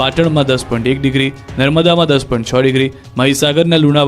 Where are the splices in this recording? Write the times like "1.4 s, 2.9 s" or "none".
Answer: 3.2 s